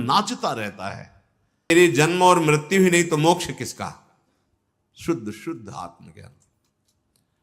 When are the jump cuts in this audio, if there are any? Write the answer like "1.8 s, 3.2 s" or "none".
1.7 s